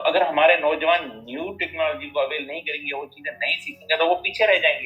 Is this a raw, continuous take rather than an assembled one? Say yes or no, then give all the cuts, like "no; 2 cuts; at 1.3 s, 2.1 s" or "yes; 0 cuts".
yes; 0 cuts